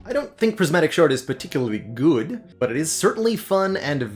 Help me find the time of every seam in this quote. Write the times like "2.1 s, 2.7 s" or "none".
2.4 s